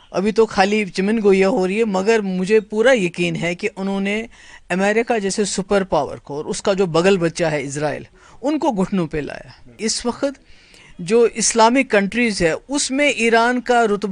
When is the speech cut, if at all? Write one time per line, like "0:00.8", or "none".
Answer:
0:09.7